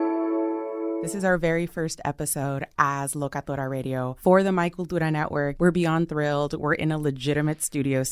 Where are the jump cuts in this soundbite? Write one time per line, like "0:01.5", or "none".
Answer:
0:01.0

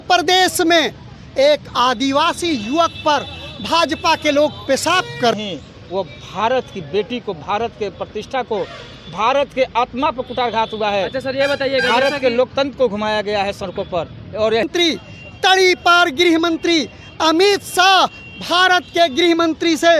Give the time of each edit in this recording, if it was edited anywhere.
0:05.4
0:14.6

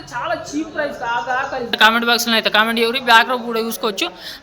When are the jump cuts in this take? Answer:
0:01.8

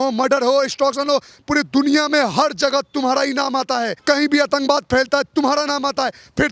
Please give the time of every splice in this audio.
0:03.9

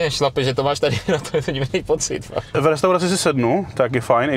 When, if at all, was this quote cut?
0:02.6

